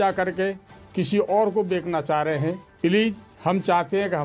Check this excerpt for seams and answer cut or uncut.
cut